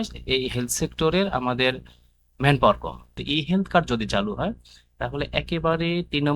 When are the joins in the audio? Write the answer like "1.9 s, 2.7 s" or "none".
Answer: 3.2 s